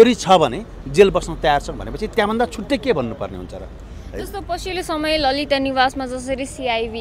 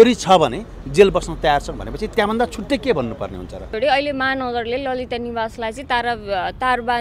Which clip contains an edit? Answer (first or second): second